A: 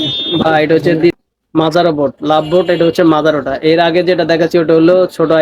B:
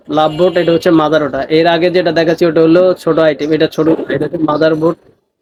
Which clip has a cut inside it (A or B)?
A